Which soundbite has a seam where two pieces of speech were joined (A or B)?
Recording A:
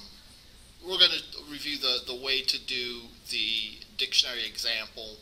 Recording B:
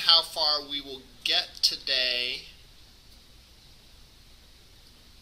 A